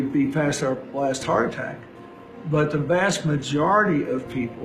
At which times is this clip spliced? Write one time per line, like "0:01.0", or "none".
none